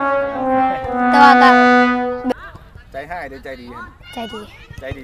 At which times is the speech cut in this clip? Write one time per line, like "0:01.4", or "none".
0:02.3